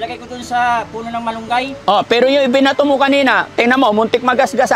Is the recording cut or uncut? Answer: uncut